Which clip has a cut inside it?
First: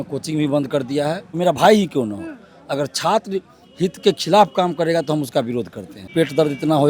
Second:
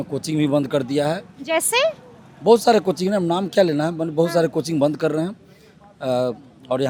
first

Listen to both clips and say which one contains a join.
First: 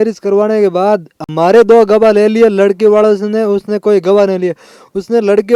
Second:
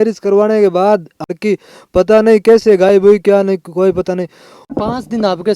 second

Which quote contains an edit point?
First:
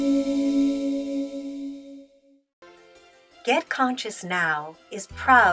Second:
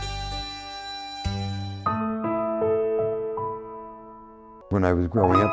first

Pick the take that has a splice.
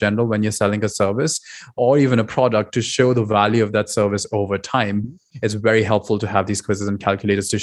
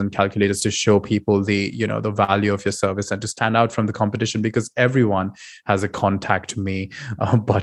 first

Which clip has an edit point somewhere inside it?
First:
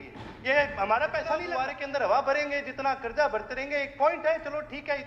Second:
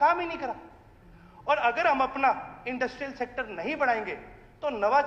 first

